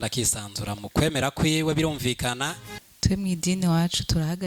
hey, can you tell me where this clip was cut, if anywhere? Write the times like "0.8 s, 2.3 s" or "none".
2.9 s